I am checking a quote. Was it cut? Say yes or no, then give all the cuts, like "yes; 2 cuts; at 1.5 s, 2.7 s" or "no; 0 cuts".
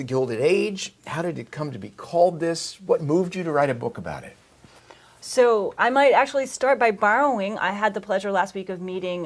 no; 0 cuts